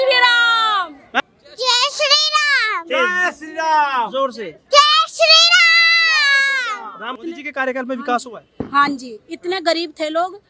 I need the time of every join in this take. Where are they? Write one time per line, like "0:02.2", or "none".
0:01.2
0:07.2